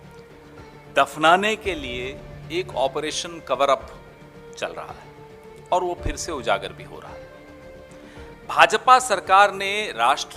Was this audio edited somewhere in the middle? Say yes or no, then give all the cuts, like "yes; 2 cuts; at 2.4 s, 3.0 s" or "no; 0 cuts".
yes; 1 cut; at 0.9 s